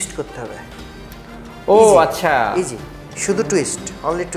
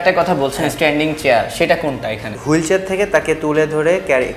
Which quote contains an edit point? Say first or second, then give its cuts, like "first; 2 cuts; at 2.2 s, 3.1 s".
second; 1 cut; at 2.3 s